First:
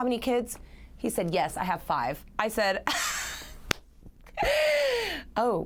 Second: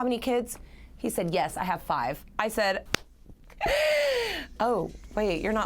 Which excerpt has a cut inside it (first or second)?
second